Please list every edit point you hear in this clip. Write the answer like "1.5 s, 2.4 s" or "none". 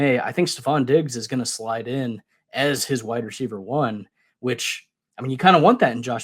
none